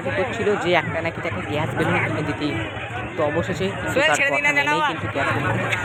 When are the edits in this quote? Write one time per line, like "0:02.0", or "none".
none